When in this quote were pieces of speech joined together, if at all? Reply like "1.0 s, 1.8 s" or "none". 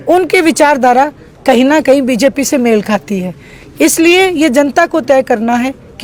none